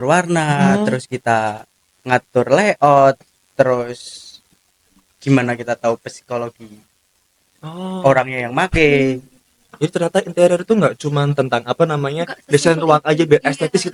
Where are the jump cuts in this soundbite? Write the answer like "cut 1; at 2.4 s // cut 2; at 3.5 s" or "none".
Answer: none